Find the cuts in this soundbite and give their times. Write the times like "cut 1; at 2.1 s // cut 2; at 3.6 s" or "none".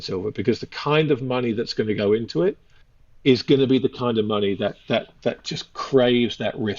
none